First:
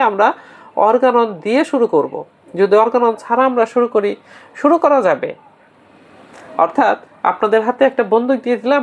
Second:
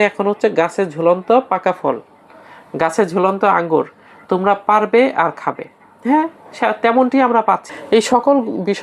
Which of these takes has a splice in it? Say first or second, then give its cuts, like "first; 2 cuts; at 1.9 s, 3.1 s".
second; 1 cut; at 7.7 s